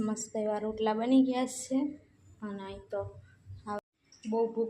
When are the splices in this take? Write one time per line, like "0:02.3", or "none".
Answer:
0:03.8

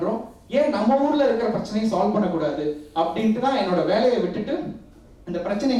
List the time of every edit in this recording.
none

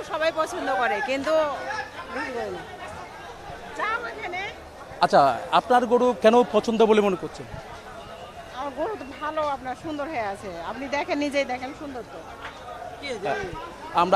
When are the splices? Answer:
none

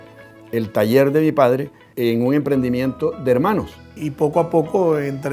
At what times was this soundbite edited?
0:01.8
0:04.0

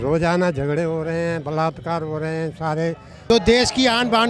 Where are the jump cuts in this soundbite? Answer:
0:03.1

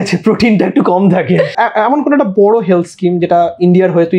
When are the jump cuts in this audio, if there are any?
0:01.5

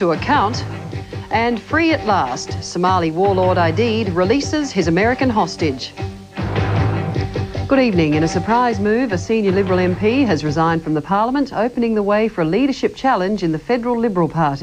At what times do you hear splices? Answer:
0:05.5

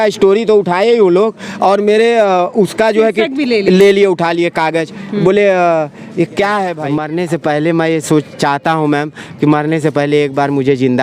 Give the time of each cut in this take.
0:06.8

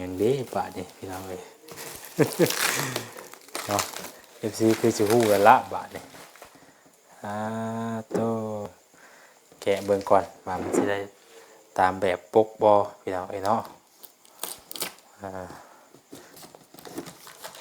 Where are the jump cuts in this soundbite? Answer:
0:08.7
0:16.3

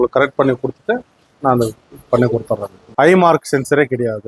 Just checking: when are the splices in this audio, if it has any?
0:02.9

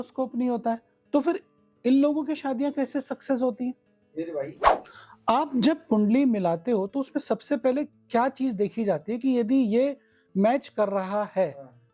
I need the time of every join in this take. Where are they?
0:04.7

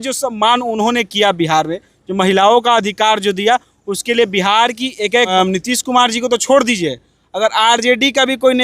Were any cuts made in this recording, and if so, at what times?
0:05.3

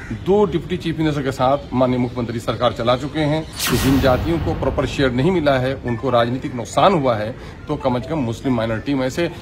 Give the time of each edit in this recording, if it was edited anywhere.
0:03.5

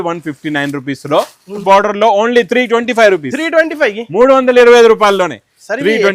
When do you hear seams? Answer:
0:01.6

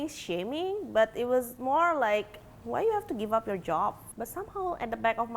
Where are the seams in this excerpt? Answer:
0:04.1

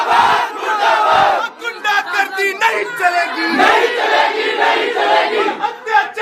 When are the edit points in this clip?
none

